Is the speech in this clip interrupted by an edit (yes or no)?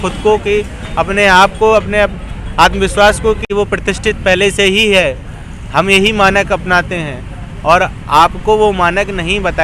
yes